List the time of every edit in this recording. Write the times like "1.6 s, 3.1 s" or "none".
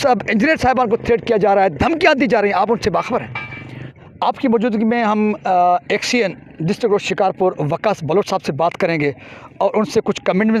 4.1 s